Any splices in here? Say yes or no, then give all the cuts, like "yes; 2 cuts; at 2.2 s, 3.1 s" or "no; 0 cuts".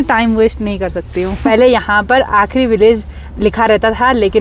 yes; 1 cut; at 1.4 s